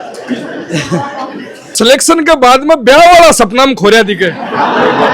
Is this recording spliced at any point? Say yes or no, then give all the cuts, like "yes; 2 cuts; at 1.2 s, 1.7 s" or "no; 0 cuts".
yes; 1 cut; at 1.8 s